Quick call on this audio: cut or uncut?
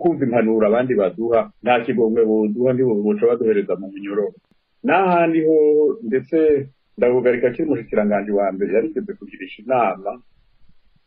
cut